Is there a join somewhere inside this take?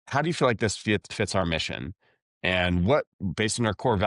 no; 0 cuts

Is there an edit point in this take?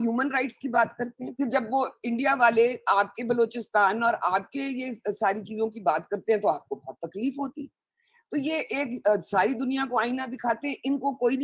no; 0 cuts

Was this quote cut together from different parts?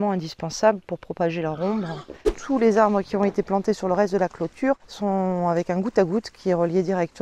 yes; 2 cuts; at 2.4 s, 4.9 s

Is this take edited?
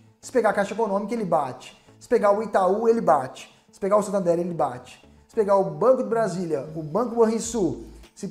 no; 0 cuts

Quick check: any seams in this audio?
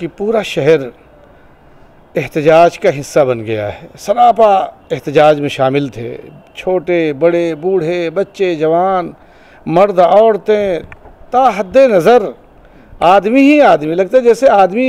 no; 0 cuts

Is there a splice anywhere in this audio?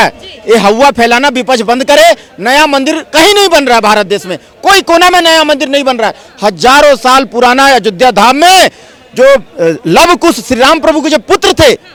no; 0 cuts

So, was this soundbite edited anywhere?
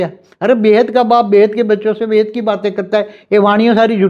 no; 0 cuts

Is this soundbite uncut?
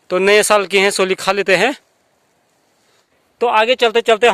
yes; 0 cuts

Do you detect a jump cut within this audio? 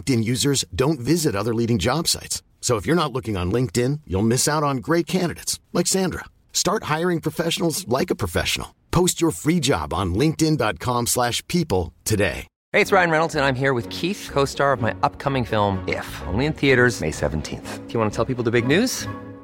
yes; 1 cut; at 12.5 s

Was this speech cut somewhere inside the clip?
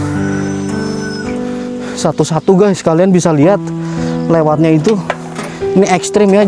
yes; 1 cut; at 1.4 s

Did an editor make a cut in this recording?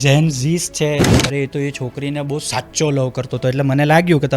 yes; 1 cut; at 1.1 s

